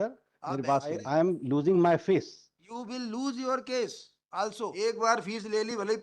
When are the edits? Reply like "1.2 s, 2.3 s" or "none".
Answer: 1.0 s, 4.7 s